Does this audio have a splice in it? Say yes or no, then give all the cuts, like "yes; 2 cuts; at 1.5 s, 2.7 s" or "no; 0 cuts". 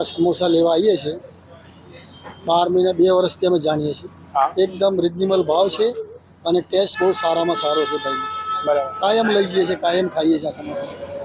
no; 0 cuts